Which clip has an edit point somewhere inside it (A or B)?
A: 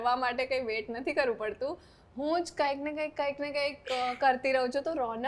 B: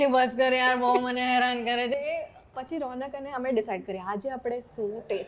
B